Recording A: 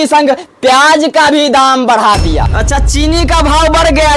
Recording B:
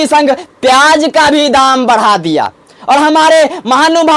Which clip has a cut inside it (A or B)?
A